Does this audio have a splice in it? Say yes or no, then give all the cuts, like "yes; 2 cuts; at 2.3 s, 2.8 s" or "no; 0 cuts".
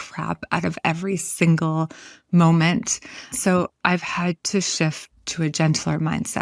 yes; 1 cut; at 3.4 s